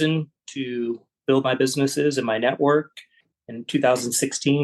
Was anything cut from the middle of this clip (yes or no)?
no